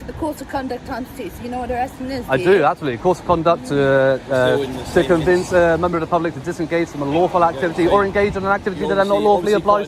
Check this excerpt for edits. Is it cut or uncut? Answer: uncut